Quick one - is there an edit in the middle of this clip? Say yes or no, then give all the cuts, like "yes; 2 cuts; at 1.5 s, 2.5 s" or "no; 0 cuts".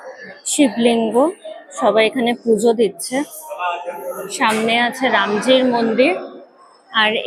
no; 0 cuts